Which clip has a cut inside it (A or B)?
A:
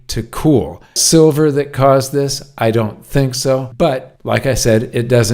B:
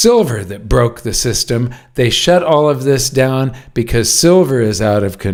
A